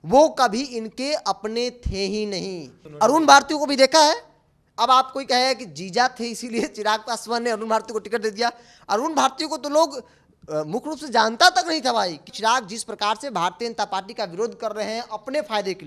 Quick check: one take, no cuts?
no; 2 cuts; at 2.8 s, 12.3 s

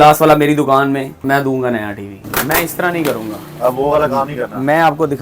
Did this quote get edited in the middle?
yes; 2 cuts; at 1.2 s, 2.2 s

